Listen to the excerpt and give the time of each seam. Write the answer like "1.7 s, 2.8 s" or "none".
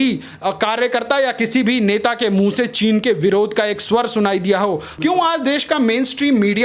4.9 s